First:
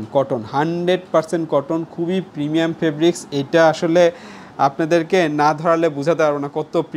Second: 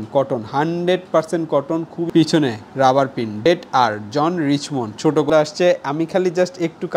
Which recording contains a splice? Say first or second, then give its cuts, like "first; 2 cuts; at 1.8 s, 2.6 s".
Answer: second; 2 cuts; at 2.0 s, 5.3 s